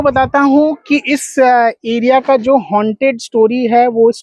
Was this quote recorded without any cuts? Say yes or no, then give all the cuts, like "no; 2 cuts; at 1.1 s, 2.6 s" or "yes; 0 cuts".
yes; 0 cuts